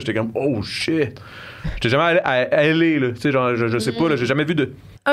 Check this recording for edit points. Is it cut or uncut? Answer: uncut